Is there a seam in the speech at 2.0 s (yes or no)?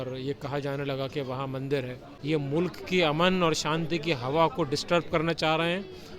yes